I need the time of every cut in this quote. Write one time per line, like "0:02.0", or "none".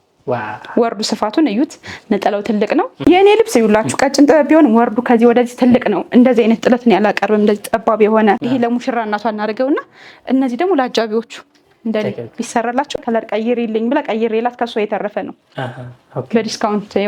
0:03.0
0:08.4
0:13.0